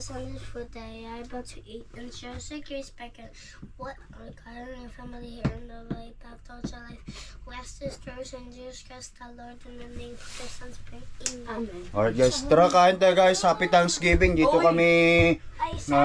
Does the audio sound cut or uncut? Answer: uncut